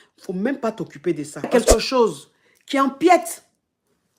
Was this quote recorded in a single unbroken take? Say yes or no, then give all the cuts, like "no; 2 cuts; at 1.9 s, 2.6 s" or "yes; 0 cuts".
no; 1 cut; at 1.5 s